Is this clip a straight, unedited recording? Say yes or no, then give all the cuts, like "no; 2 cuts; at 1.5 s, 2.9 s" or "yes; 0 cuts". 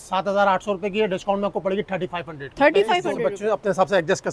no; 1 cut; at 3.1 s